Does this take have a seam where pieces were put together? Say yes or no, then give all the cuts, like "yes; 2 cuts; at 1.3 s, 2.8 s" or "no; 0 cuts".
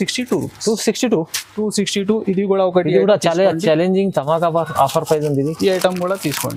no; 0 cuts